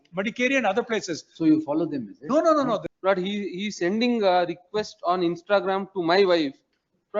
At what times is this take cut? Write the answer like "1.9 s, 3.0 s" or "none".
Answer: 2.9 s